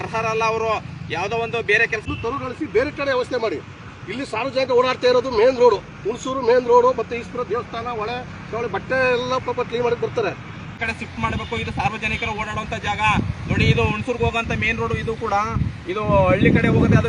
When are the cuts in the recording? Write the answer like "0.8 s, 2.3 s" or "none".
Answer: 2.0 s, 10.7 s